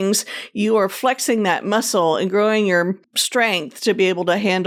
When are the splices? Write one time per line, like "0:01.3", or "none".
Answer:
none